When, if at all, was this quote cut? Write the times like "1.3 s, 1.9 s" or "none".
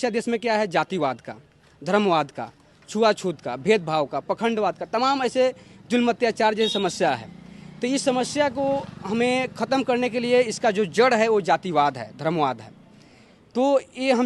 none